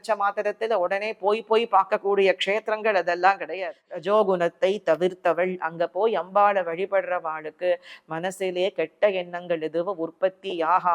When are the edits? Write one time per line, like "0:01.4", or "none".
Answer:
0:03.5